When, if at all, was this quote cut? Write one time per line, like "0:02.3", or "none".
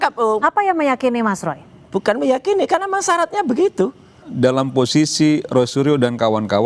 0:04.2